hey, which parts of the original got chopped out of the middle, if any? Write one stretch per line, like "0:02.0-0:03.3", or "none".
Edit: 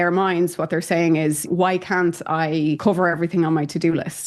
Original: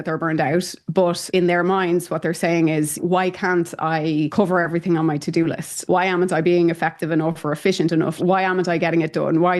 none